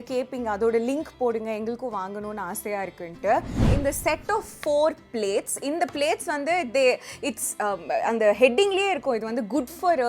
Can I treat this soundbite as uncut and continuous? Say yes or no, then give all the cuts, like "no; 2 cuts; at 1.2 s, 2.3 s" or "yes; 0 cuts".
no; 1 cut; at 3.6 s